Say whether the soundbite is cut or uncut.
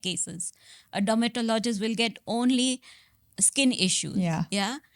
uncut